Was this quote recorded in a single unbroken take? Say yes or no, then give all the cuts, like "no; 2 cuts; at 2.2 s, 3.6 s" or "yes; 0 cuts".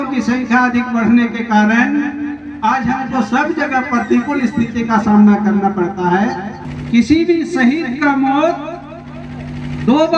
no; 1 cut; at 6.6 s